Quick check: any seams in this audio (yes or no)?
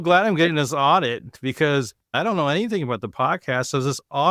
yes